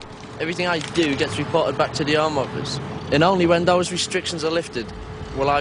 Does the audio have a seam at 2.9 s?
yes; 1 cut; at 2.9 s

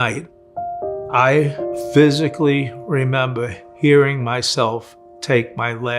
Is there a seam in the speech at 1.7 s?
yes; 1 cut; at 1.7 s

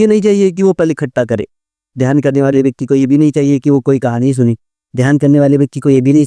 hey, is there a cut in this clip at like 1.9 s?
no; 0 cuts

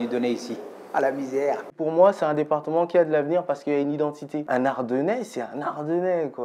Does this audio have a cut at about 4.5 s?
yes; 2 cuts; at 1.7 s, 4.5 s

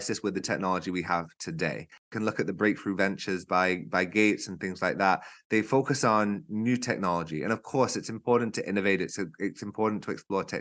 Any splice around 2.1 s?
yes; 1 cut; at 2.1 s

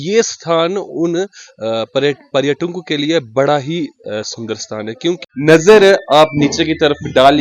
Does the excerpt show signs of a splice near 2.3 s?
no; 1 cut; at 5.3 s

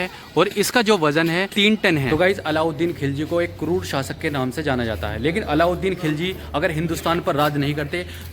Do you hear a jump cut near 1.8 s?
yes; 1 cut; at 1.8 s

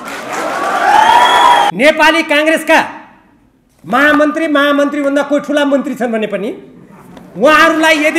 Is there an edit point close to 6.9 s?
no; 1 cut; at 1.7 s

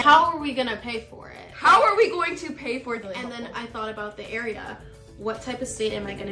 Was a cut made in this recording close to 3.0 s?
yes; 1 cut; at 3.0 s

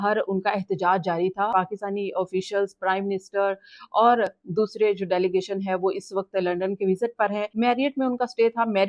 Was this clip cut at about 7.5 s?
yes; 2 cuts; at 1.5 s, 7.5 s

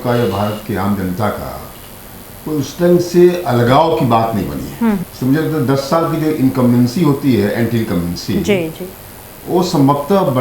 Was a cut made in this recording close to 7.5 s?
no; 1 cut; at 5.0 s

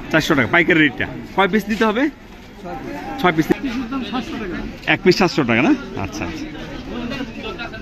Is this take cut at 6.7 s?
no; 1 cut; at 3.5 s

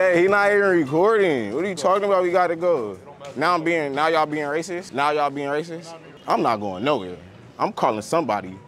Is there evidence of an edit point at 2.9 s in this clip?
no; 2 cuts; at 4.8 s, 6.1 s

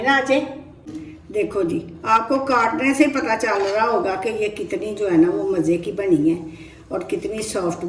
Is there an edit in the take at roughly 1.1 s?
yes; 1 cut; at 1.1 s

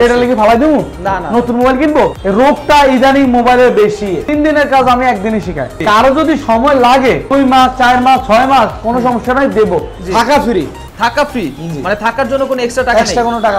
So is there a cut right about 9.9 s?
yes; 3 cuts; at 4.2 s, 7.2 s, 9.9 s

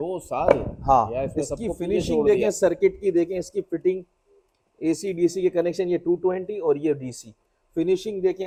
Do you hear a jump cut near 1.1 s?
no; 0 cuts

